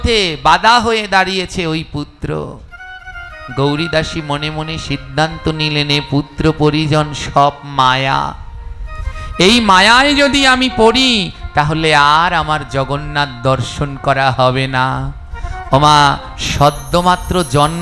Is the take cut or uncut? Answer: uncut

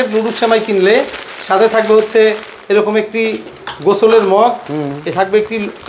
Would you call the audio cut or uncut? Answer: uncut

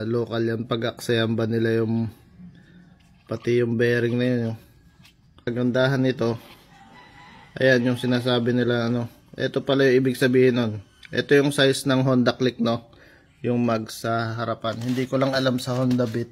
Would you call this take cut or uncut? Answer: cut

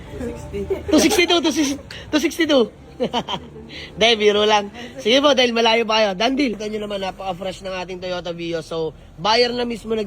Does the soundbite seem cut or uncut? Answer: cut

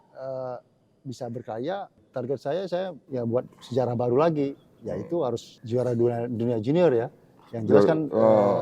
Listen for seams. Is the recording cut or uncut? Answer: cut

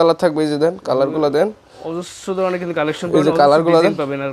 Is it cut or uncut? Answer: uncut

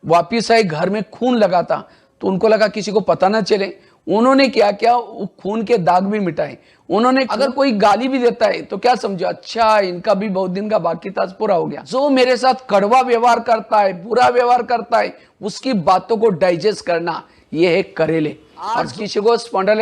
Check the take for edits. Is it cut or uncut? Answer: cut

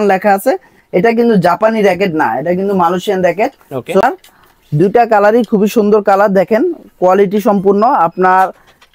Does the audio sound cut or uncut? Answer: cut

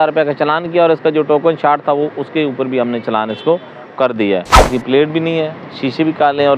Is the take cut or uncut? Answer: cut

